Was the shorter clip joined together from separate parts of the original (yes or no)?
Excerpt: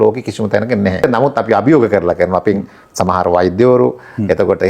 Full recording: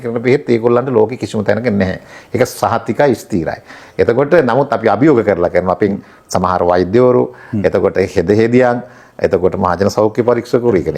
yes